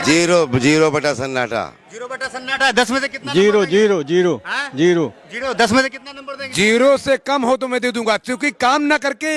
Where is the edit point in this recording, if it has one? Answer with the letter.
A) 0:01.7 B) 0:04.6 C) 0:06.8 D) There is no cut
D